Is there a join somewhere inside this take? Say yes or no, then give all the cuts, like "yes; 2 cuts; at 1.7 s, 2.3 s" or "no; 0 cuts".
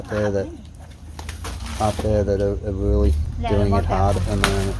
yes; 1 cut; at 3.3 s